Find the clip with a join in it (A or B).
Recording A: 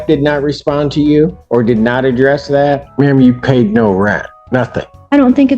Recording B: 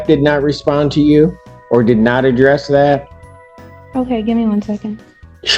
A